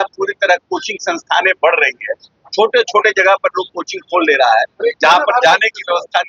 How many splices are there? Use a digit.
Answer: 0